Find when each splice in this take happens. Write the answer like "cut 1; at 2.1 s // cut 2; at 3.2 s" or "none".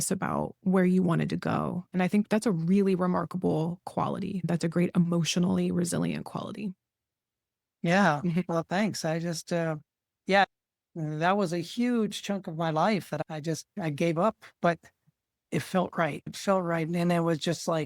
cut 1; at 4.4 s // cut 2; at 10.4 s